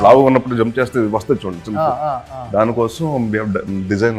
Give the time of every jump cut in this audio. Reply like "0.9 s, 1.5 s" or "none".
none